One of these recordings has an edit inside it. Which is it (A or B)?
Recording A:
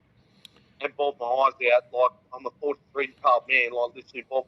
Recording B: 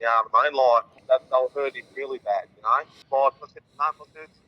B